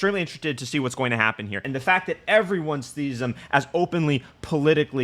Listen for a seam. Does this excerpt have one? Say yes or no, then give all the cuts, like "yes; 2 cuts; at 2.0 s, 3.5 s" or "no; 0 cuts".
yes; 1 cut; at 1.6 s